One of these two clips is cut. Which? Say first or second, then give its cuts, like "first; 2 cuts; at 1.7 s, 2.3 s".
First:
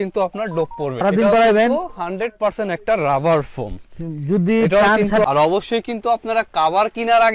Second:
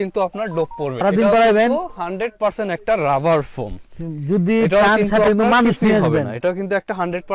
first; 1 cut; at 5.2 s